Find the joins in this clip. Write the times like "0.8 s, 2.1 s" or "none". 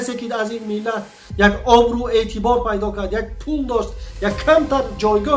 none